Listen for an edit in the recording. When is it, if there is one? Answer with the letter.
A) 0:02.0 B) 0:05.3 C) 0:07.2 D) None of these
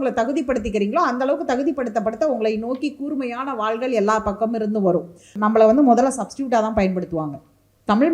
B